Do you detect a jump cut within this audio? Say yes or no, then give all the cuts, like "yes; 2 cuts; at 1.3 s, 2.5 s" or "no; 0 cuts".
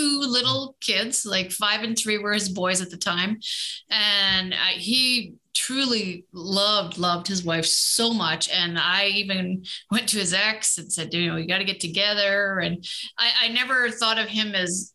no; 0 cuts